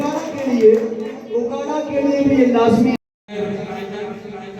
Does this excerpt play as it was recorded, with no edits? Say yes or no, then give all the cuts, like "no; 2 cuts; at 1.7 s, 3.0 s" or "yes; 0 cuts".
no; 1 cut; at 3.2 s